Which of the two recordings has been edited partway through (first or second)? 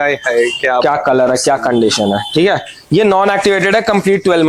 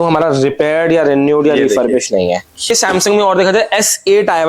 second